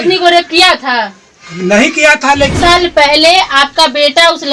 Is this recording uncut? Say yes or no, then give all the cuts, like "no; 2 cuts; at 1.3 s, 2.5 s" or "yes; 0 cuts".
no; 1 cut; at 2.5 s